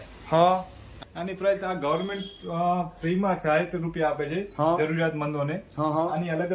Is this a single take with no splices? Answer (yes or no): no